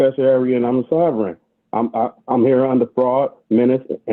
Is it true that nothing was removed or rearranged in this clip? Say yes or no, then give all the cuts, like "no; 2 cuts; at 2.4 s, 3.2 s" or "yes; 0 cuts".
yes; 0 cuts